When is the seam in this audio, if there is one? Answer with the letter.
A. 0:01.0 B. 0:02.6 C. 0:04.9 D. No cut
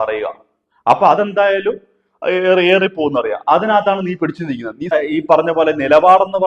C